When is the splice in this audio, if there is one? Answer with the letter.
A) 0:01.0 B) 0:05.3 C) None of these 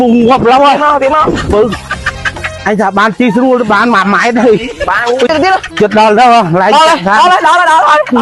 C